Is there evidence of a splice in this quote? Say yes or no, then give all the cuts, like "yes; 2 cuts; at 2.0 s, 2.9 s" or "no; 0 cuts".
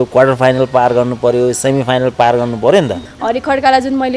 yes; 1 cut; at 3.1 s